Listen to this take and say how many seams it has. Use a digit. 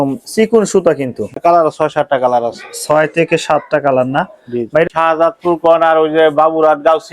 2